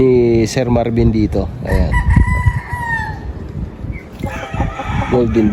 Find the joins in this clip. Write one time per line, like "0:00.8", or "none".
none